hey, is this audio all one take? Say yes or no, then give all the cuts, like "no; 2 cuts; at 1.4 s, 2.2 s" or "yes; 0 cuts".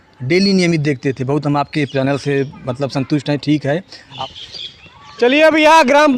no; 1 cut; at 3.9 s